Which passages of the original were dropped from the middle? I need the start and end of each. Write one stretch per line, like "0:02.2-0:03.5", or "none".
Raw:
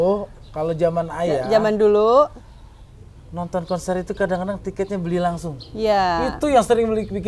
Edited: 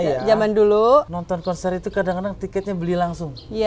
0:02.4-0:03.4